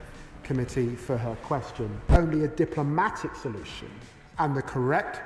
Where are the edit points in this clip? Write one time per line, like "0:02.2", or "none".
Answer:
0:02.0